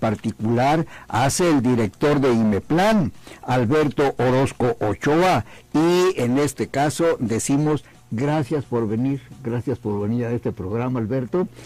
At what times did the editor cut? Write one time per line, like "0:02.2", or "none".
none